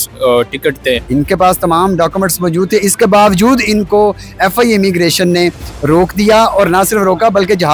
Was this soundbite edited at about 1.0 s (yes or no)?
yes